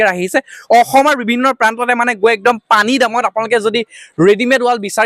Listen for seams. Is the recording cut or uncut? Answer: uncut